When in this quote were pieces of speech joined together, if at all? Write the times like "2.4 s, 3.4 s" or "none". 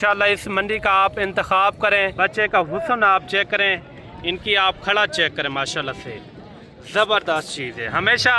2.1 s